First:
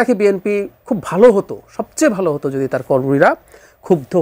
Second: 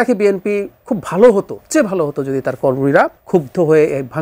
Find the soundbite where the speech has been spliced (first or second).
second